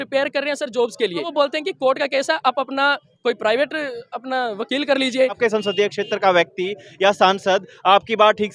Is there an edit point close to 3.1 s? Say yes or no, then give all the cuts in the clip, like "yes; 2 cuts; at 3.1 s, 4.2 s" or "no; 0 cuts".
yes; 3 cuts; at 1.3 s, 3.1 s, 5.4 s